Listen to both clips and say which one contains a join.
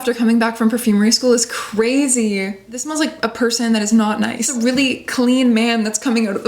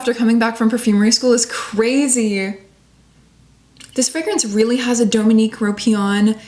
first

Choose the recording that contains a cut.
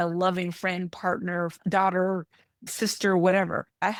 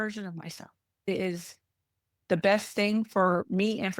second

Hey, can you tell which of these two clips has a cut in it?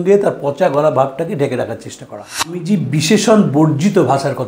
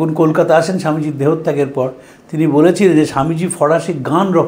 first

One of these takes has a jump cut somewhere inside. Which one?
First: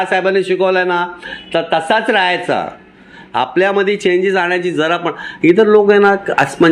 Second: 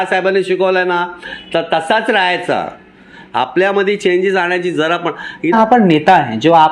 second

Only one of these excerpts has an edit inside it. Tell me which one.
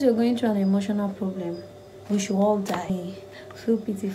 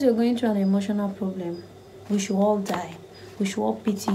first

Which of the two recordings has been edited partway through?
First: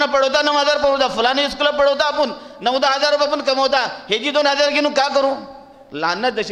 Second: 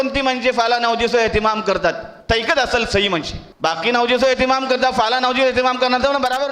second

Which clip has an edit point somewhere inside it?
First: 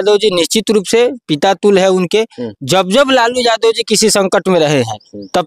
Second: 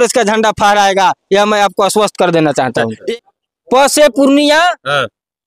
second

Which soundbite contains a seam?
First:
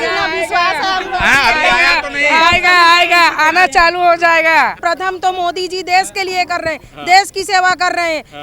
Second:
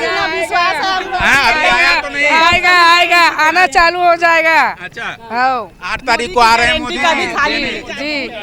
first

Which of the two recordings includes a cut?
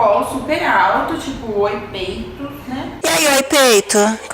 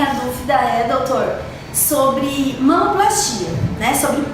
first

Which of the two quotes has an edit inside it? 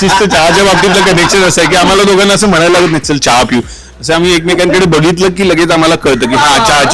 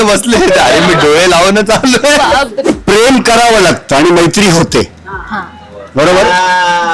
second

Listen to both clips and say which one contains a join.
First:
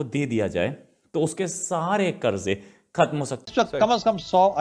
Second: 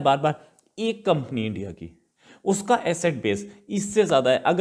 first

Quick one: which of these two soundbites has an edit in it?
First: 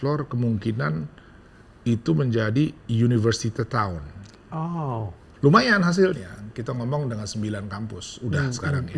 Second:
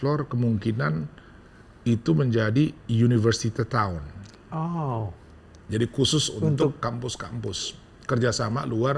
first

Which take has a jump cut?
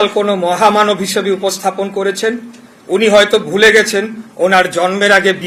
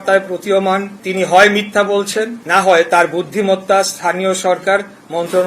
second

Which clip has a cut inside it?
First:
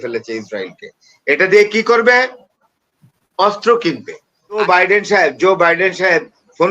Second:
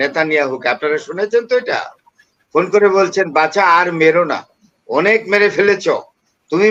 first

